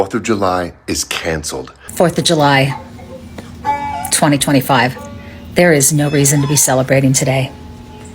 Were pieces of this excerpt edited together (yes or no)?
yes